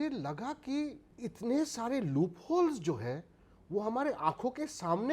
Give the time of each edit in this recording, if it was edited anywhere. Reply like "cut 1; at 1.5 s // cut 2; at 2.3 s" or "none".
cut 1; at 1.1 s